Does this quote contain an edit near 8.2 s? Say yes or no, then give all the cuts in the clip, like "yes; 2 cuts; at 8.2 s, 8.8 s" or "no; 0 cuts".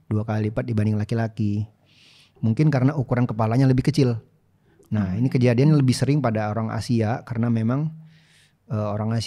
no; 0 cuts